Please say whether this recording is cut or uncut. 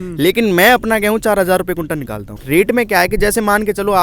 cut